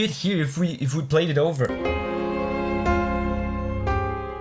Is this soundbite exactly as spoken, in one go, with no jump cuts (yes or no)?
no